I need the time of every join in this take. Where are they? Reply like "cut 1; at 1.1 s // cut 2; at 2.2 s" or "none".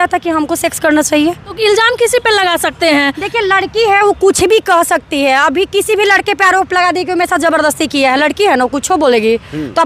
cut 1; at 1.5 s